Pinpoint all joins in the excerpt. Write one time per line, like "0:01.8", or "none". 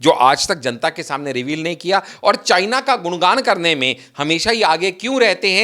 none